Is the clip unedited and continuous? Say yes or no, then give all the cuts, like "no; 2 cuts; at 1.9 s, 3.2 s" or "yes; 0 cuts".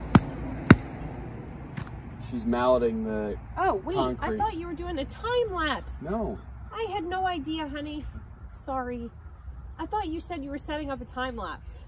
yes; 0 cuts